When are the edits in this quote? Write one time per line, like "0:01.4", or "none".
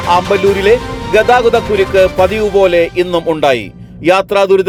none

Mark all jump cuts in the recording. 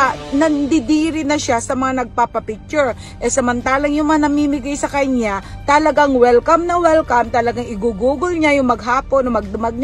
none

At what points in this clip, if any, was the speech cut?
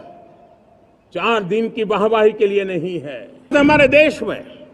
0:03.5

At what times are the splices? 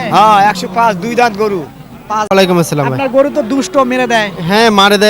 0:02.3

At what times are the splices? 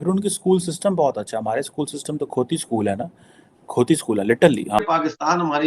0:04.8

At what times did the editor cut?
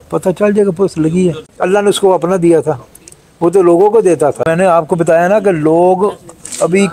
0:01.4
0:04.4

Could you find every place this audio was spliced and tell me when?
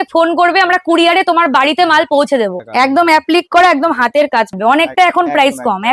0:02.6
0:04.5

